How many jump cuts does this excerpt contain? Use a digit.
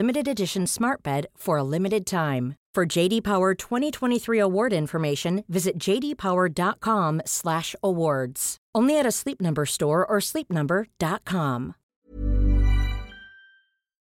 1